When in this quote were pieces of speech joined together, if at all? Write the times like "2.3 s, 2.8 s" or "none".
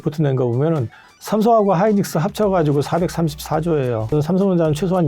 4.1 s